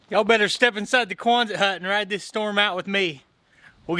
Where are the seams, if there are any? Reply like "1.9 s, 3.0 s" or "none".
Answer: none